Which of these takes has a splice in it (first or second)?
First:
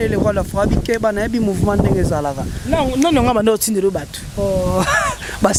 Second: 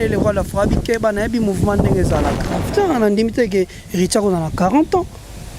second